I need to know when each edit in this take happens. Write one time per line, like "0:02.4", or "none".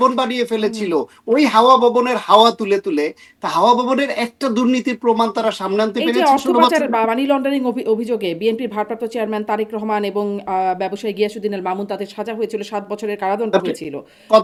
none